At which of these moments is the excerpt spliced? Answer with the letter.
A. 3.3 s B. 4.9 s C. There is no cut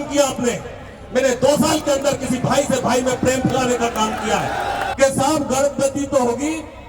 B